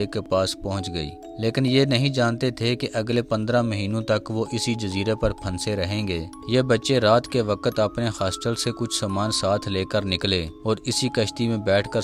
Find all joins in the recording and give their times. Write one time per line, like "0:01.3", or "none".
0:01.2
0:06.3